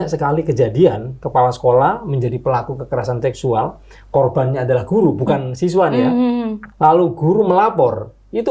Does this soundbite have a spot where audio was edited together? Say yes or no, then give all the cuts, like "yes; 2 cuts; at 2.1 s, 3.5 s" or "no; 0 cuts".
yes; 2 cuts; at 1.1 s, 6.6 s